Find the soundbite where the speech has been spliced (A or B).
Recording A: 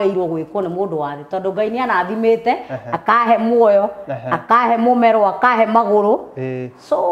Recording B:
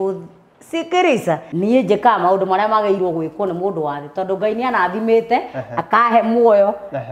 B